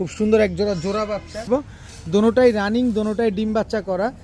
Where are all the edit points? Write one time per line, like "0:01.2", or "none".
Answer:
0:01.5